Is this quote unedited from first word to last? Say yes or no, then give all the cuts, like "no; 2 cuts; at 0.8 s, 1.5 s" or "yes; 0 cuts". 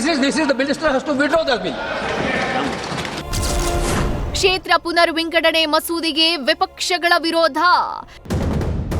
yes; 0 cuts